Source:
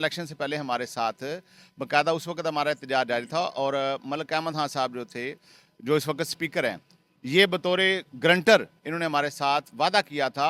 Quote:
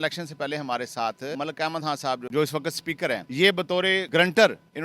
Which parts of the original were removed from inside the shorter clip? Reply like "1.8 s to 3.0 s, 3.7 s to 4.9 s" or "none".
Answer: 1.8 s to 5.3 s, 6.8 s to 7.2 s, 8.0 s to 8.2 s